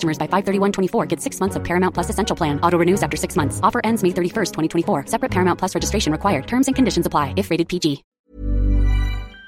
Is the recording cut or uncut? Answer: cut